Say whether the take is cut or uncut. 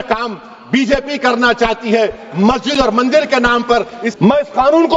cut